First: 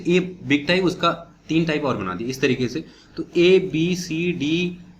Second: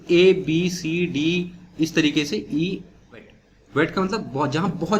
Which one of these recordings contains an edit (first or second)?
second